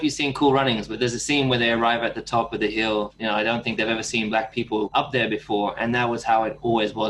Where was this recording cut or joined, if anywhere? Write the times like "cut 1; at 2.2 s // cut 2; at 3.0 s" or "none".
cut 1; at 0.9 s // cut 2; at 3.1 s // cut 3; at 4.9 s

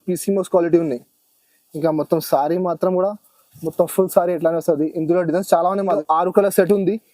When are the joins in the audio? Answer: cut 1; at 6.0 s

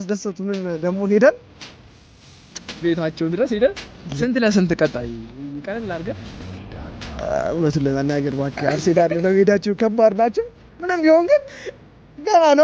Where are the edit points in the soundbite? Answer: none

